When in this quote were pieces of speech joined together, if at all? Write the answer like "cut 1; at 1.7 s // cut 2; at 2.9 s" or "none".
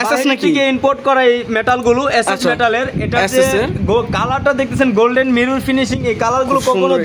none